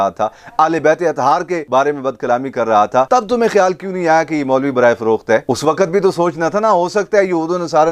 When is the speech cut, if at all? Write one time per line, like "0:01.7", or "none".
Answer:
0:01.6